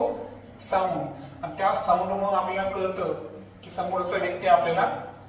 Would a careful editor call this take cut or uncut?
uncut